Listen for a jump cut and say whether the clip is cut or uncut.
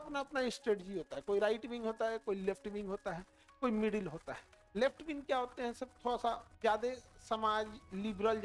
cut